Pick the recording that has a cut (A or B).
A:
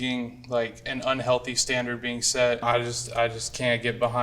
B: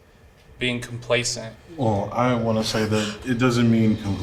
A